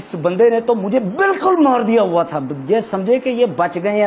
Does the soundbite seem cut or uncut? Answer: uncut